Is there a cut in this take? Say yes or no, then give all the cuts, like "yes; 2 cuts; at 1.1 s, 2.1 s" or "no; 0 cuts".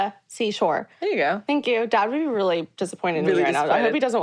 no; 0 cuts